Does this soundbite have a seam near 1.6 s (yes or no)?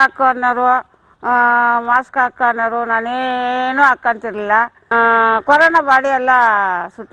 no